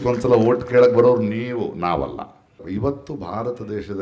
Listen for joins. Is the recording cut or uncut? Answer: cut